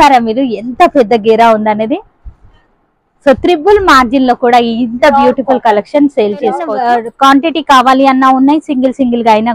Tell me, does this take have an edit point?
yes; 1 cut; at 6.7 s

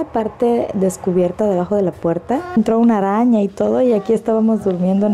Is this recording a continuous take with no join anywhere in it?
no; 1 cut; at 2.6 s

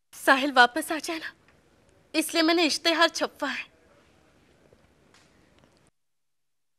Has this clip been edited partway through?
no; 0 cuts

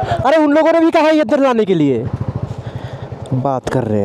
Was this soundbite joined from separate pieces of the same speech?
no; 0 cuts

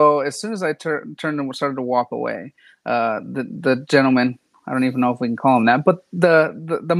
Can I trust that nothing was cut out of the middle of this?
yes; 0 cuts

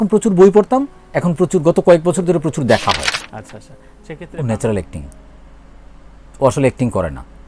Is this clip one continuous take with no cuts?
no; 1 cut; at 3.6 s

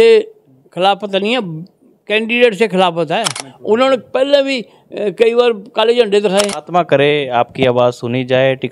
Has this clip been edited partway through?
yes; 2 cuts; at 3.5 s, 6.6 s

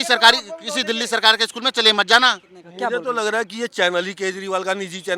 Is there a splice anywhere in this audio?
yes; 1 cut; at 2.6 s

